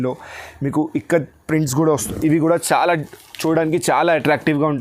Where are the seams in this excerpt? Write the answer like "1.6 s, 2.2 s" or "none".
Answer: 2.1 s

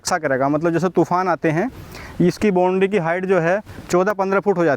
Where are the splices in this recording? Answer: 3.8 s

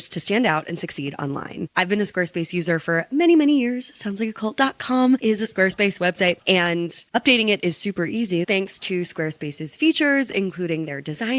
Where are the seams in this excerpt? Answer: 1.7 s, 8.5 s

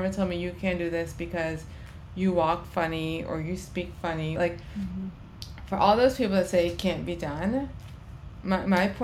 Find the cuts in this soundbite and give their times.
4.4 s

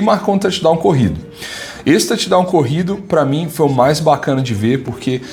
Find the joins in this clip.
none

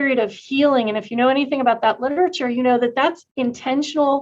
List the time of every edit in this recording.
3.3 s

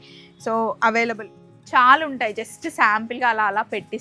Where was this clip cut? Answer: 1.3 s

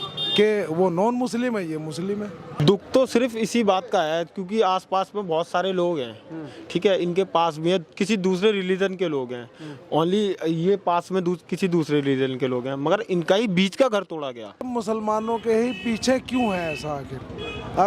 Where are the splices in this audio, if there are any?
2.6 s, 14.7 s

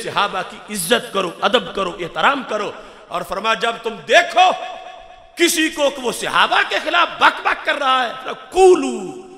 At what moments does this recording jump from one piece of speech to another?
none

